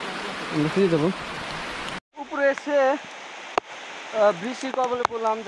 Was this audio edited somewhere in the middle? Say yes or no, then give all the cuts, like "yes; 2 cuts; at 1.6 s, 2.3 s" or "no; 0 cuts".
no; 0 cuts